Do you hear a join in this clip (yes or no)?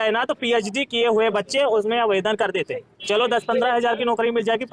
no